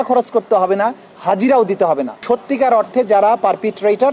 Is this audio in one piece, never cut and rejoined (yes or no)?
no